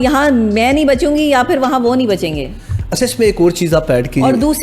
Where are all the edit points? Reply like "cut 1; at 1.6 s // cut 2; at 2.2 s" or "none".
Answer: none